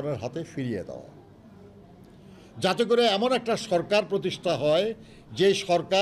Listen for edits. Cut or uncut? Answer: uncut